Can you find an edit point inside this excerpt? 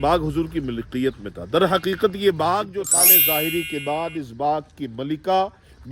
yes; 1 cut; at 2.8 s

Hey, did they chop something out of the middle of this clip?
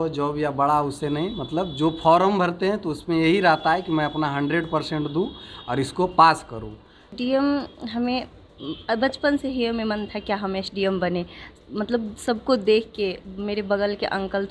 yes; 1 cut; at 7.1 s

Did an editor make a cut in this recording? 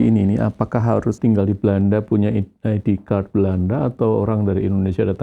yes; 1 cut; at 1.2 s

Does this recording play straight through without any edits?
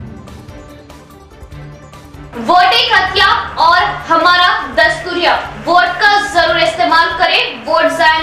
yes; 0 cuts

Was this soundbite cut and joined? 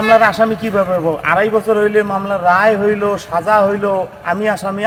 no; 0 cuts

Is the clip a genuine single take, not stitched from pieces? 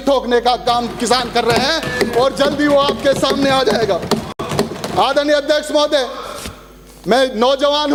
yes; 0 cuts

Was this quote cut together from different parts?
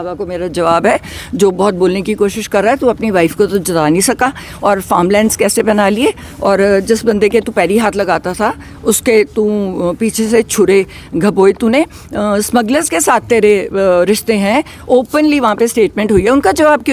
no; 0 cuts

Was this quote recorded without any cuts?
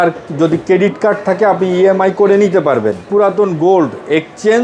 no; 1 cut; at 3.0 s

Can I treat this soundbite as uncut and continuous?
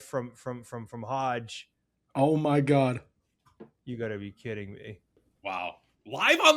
no; 1 cut; at 5.3 s

